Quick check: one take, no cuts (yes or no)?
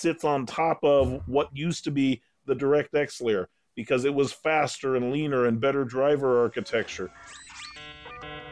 no